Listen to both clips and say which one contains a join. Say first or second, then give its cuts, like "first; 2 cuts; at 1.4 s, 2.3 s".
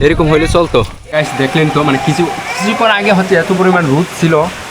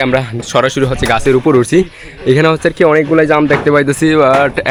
first; 1 cut; at 1.0 s